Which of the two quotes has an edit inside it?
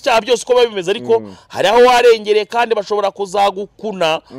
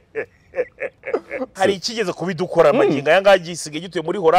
second; 1 cut; at 1.5 s

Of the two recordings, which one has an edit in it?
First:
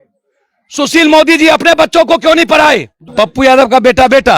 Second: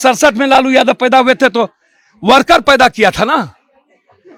first; 1 cut; at 3.0 s

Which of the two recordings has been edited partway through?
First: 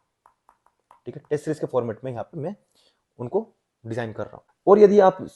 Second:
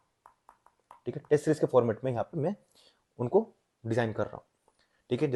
first; 1 cut; at 4.4 s

